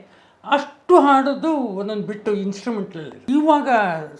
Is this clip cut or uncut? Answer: cut